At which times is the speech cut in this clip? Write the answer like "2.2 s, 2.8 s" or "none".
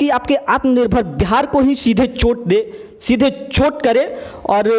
none